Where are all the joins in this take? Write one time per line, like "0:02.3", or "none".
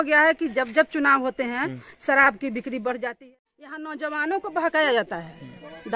0:03.3